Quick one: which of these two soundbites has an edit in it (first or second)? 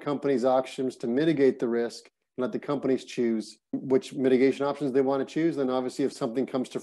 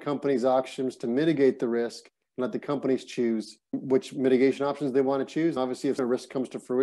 second